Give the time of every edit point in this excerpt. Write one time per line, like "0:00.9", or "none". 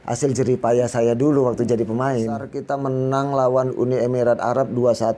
0:02.6